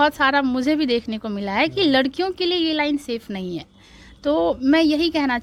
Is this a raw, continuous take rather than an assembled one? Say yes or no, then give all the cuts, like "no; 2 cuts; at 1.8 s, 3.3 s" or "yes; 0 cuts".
yes; 0 cuts